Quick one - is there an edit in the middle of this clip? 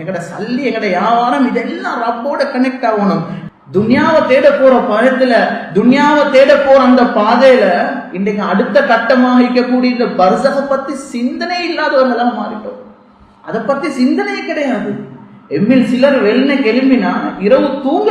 yes; 1 cut; at 3.4 s

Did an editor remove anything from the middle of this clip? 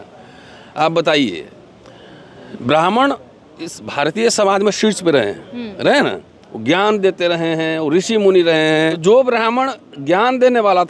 yes; 1 cut; at 9.0 s

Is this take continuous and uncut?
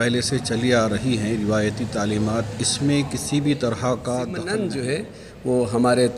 no; 1 cut; at 4.6 s

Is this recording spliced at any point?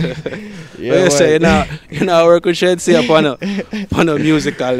no; 0 cuts

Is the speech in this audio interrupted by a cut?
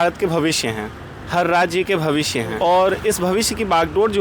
yes; 1 cut; at 2.5 s

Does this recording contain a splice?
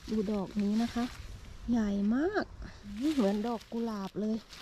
yes; 1 cut; at 3.0 s

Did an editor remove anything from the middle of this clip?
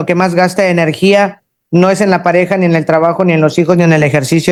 no; 0 cuts

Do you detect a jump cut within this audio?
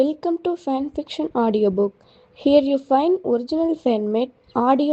no; 0 cuts

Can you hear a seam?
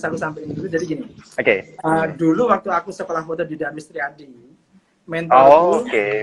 no; 0 cuts

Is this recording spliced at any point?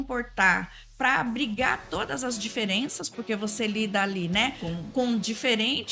no; 0 cuts

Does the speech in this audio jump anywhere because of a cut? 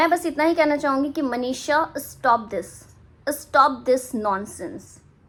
no; 0 cuts

